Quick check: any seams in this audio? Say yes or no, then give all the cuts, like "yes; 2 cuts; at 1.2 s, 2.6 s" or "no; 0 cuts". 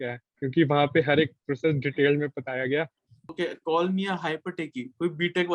yes; 1 cut; at 3.3 s